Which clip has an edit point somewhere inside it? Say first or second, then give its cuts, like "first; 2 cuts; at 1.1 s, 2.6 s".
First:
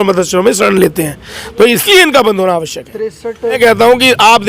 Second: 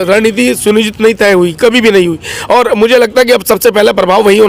first; 1 cut; at 3.6 s